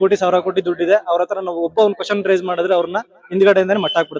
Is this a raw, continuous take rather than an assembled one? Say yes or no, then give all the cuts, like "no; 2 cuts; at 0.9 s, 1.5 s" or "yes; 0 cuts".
yes; 0 cuts